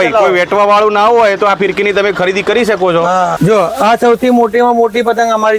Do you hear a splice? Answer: yes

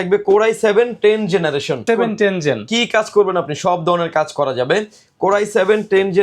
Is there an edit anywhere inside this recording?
no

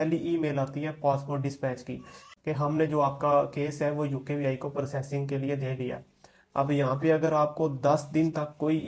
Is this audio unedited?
yes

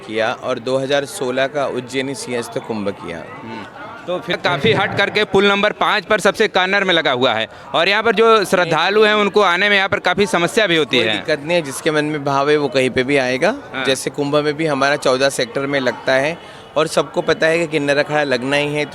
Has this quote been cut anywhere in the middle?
no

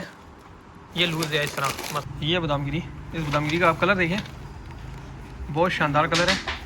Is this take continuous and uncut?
no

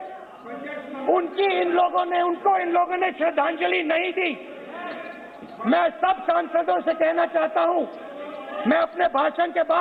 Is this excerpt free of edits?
yes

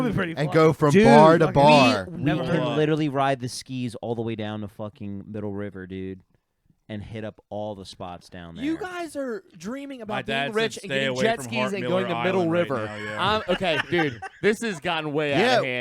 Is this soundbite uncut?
no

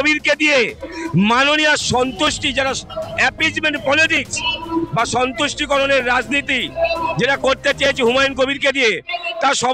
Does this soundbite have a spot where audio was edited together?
no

